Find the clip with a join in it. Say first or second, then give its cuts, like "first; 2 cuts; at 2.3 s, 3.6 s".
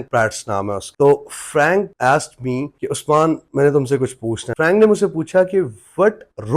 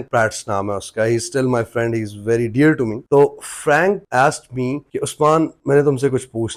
first; 2 cuts; at 0.9 s, 4.5 s